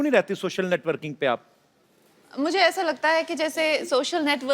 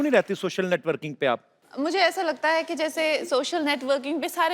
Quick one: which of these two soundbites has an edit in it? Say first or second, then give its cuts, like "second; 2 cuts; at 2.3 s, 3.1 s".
second; 1 cut; at 1.6 s